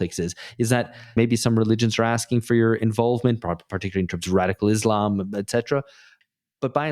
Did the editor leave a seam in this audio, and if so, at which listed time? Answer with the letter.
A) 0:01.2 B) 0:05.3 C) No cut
A